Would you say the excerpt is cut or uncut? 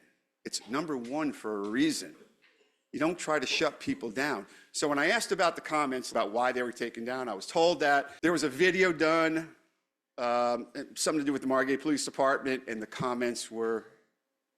cut